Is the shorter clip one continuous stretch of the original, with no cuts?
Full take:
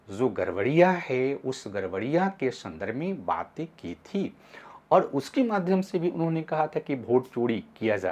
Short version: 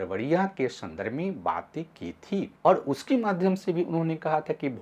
no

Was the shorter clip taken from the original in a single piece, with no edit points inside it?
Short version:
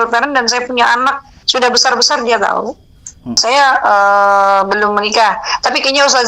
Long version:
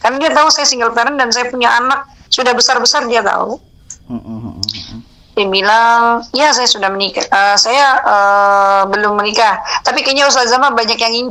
no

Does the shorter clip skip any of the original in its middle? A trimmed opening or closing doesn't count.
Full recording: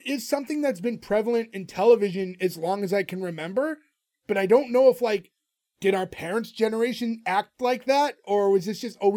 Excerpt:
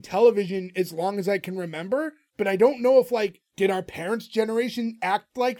yes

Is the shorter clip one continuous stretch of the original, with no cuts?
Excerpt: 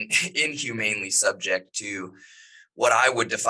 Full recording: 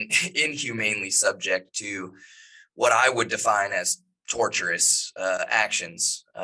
yes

